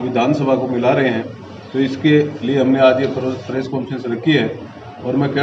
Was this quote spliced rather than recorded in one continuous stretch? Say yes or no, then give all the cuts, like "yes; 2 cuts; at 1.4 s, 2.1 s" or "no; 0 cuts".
no; 0 cuts